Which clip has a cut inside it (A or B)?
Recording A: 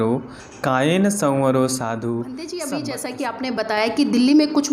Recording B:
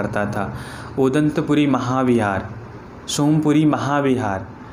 A